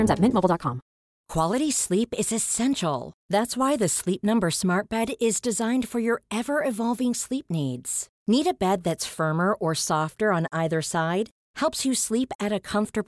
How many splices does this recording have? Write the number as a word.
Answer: one